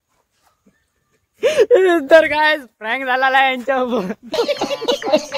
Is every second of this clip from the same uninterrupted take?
no; 1 cut; at 4.3 s

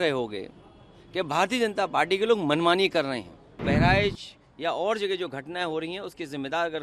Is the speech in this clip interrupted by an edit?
yes; 1 cut; at 3.6 s

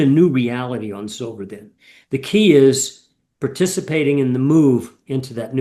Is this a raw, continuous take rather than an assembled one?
yes; 0 cuts

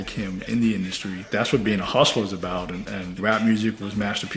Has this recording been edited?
yes; 1 cut; at 1.1 s

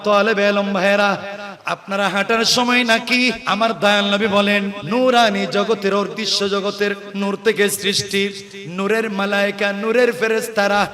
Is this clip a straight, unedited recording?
no; 3 cuts; at 3.4 s, 4.8 s, 7.1 s

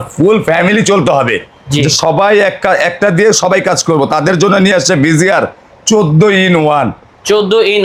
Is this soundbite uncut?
yes; 0 cuts

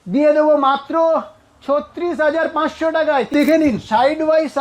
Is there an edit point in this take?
yes; 1 cut; at 3.3 s

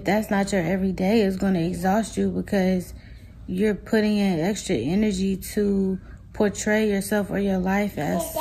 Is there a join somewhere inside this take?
no; 0 cuts

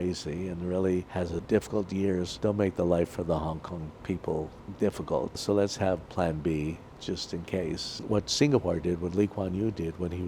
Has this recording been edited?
yes; 5 cuts; at 1.4 s, 2.3 s, 4.6 s, 5.4 s, 8.0 s

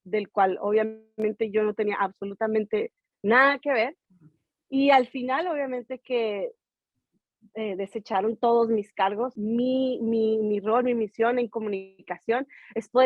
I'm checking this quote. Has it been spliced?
yes; 1 cut; at 9.3 s

